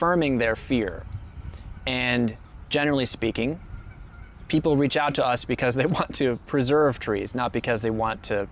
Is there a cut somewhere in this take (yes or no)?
no